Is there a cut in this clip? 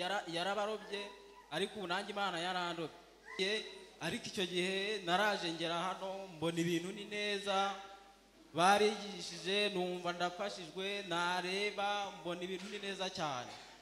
yes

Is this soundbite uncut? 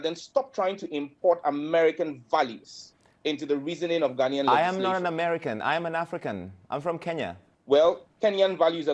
no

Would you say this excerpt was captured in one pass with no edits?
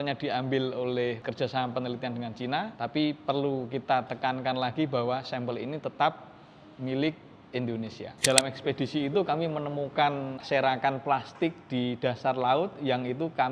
no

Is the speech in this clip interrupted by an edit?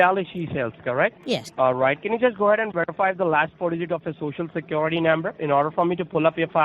yes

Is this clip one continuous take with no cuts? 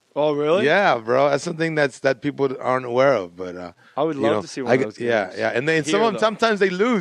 yes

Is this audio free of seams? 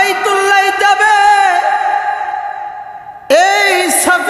yes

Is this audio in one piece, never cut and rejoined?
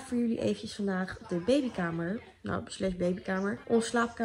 yes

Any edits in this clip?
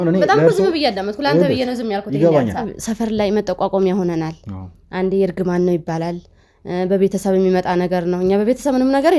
yes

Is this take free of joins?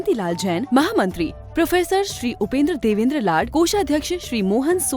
yes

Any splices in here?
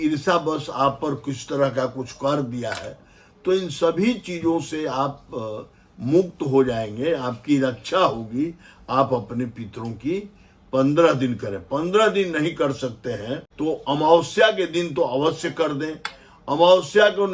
yes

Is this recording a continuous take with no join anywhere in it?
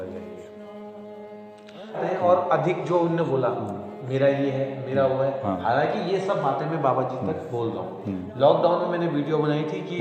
no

